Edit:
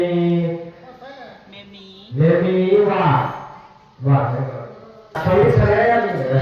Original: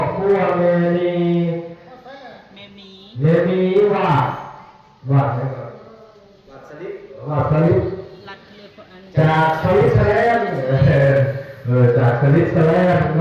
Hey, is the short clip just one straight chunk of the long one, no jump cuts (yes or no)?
no